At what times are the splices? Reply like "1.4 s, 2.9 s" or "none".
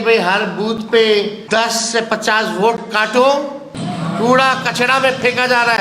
1.4 s, 3.7 s